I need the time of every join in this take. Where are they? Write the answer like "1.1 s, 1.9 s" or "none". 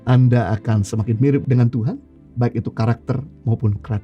1.4 s